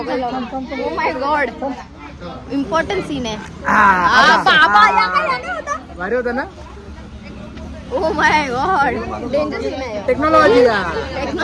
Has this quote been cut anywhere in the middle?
no; 0 cuts

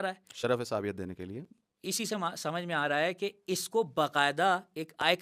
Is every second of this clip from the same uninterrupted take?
yes; 0 cuts

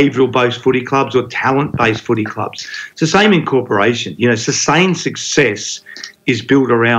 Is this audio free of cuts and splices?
yes; 0 cuts

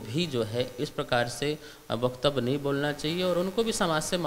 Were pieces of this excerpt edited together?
no; 0 cuts

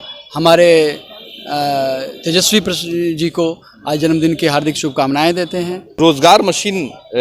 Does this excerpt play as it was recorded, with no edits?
no; 1 cut; at 5.9 s

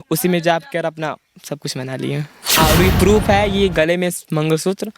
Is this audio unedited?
no; 1 cut; at 2.6 s

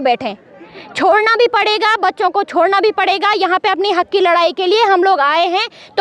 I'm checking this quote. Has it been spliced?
no; 0 cuts

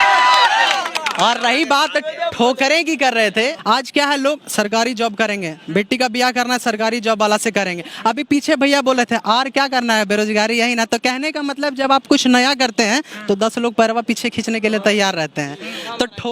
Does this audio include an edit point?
no; 0 cuts

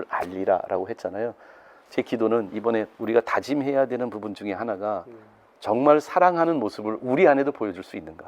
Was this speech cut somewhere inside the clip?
yes; 1 cut; at 2.9 s

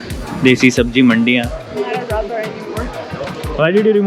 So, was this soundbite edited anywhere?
no; 0 cuts

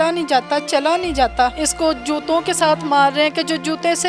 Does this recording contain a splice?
yes; 1 cut; at 1.6 s

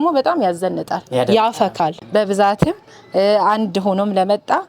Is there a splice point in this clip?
yes; 1 cut; at 2.0 s

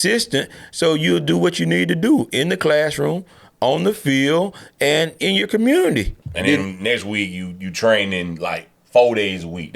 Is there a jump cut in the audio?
yes; 1 cut; at 6.2 s

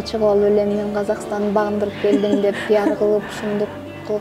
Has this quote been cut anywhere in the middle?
no; 0 cuts

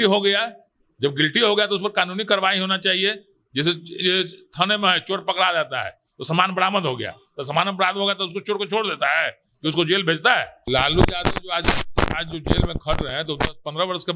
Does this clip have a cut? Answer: yes; 1 cut; at 10.5 s

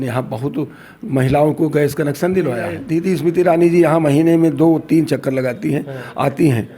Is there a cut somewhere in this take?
yes; 1 cut; at 2.8 s

